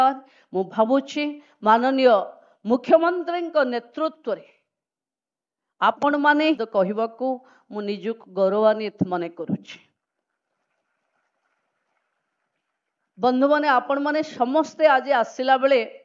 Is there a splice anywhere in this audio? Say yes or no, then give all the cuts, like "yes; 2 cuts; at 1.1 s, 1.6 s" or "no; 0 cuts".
yes; 1 cut; at 6.6 s